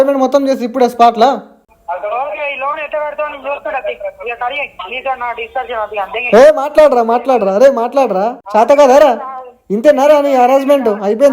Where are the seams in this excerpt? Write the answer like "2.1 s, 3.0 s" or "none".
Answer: 1.7 s, 8.4 s